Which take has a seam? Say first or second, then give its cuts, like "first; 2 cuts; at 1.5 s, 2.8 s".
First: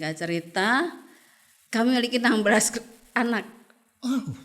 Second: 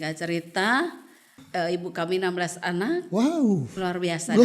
second; 1 cut; at 1.4 s